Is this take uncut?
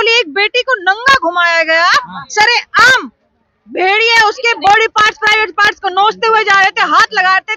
yes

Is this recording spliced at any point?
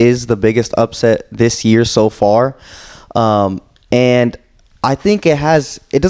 no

